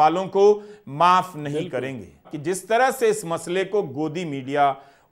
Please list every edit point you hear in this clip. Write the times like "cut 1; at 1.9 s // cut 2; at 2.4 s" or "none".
cut 1; at 2.3 s